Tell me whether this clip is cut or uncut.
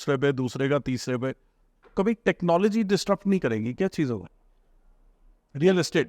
uncut